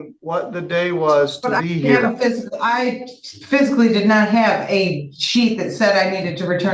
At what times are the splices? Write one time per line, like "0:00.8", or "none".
none